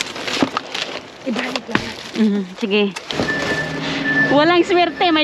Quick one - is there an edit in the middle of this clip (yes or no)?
yes